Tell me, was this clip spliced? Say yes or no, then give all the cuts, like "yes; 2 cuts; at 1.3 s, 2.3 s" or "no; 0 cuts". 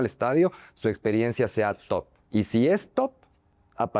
yes; 1 cut; at 2.2 s